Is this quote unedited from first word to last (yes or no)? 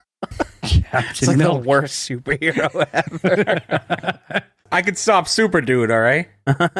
no